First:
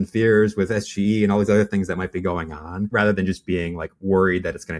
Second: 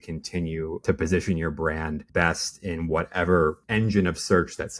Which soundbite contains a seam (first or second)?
second